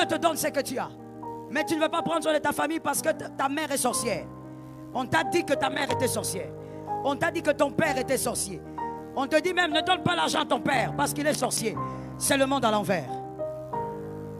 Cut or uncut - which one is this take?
uncut